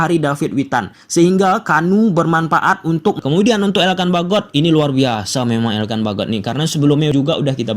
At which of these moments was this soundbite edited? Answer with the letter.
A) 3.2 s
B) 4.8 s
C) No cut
A